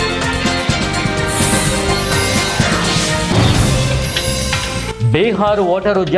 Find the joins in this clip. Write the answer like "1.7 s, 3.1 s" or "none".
4.9 s